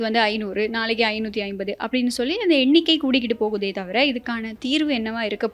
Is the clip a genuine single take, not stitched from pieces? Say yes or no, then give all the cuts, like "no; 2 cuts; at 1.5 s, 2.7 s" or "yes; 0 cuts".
yes; 0 cuts